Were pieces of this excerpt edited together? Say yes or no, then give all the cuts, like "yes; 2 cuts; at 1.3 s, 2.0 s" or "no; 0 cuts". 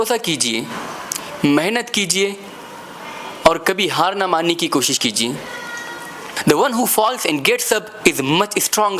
yes; 1 cut; at 6.2 s